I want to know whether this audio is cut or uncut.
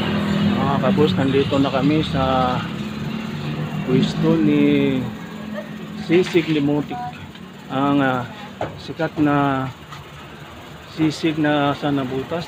uncut